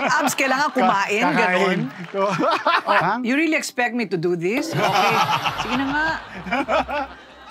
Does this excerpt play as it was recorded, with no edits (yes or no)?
no